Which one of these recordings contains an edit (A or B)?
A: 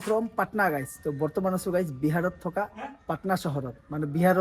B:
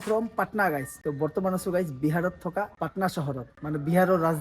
B